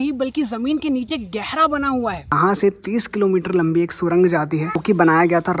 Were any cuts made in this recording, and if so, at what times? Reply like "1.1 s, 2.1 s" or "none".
2.3 s, 4.8 s